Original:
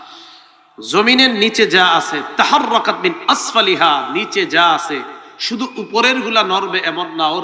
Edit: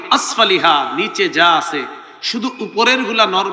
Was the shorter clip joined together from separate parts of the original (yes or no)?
no